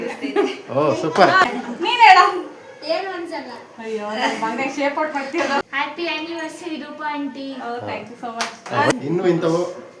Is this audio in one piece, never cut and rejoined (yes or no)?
no